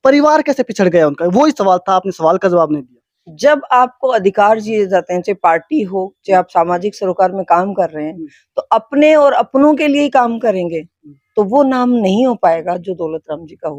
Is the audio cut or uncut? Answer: uncut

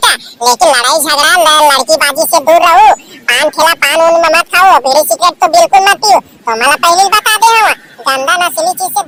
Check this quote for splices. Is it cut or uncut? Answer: uncut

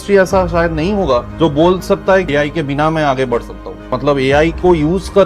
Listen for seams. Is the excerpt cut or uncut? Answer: cut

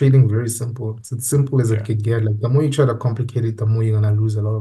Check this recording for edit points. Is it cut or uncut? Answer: uncut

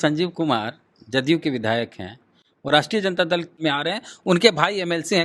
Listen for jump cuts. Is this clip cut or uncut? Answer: cut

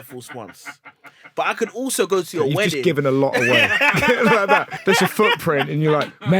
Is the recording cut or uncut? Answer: cut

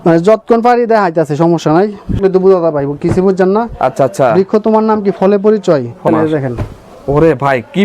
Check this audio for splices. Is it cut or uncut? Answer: cut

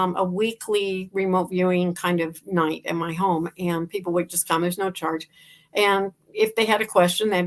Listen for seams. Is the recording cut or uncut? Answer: uncut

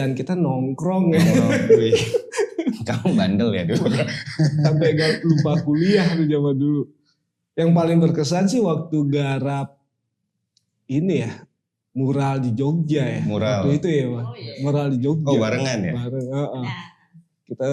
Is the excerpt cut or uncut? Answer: uncut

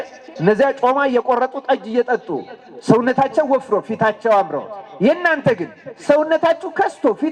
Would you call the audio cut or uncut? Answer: uncut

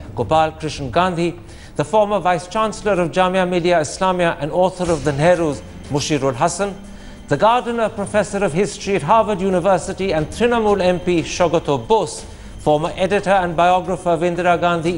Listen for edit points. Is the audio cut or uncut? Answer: uncut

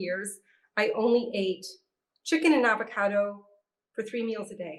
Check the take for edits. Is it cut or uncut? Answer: uncut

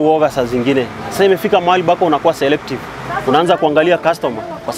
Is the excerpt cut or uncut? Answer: uncut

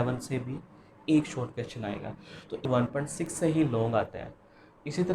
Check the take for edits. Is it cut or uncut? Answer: cut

